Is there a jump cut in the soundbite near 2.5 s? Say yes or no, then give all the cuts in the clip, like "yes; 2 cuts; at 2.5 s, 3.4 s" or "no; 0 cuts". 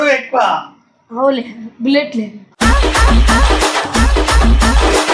no; 0 cuts